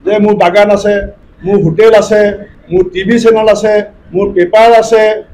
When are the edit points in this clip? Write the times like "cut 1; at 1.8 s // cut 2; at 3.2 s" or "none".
cut 1; at 2.5 s // cut 2; at 4.0 s